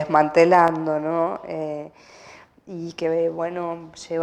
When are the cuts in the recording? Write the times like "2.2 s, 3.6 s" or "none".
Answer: none